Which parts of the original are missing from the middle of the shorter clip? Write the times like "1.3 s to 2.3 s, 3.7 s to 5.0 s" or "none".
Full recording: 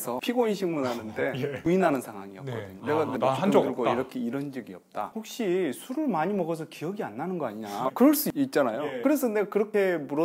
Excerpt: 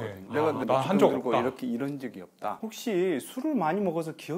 none